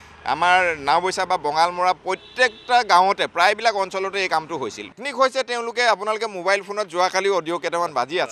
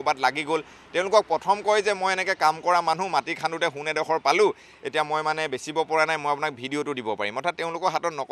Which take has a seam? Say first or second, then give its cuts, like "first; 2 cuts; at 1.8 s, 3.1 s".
first; 1 cut; at 5.0 s